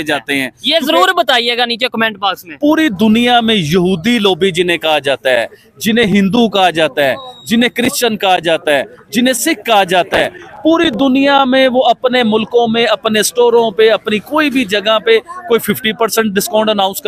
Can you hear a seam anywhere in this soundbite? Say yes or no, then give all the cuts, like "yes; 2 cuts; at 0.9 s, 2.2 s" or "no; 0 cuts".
yes; 1 cut; at 2.5 s